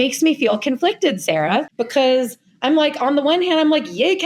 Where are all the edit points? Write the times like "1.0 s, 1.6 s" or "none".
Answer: 1.7 s